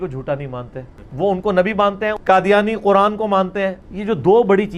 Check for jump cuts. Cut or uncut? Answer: cut